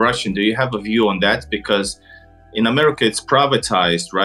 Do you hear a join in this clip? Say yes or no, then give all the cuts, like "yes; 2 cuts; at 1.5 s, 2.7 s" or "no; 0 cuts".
no; 0 cuts